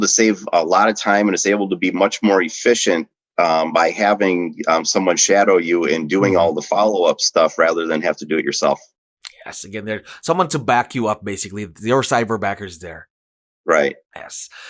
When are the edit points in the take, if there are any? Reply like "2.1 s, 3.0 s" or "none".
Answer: none